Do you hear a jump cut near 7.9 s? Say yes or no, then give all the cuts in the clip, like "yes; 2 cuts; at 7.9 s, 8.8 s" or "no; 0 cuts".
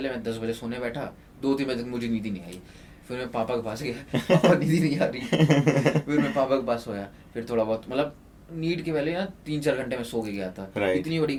no; 0 cuts